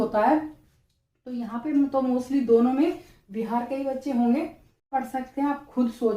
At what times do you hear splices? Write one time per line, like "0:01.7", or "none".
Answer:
0:04.9